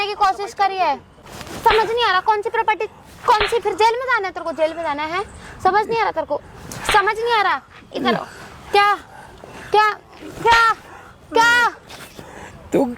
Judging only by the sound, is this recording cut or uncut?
uncut